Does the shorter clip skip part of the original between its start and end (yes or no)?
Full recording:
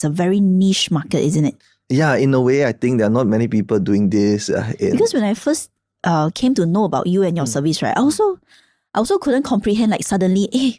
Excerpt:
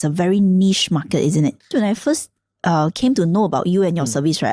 yes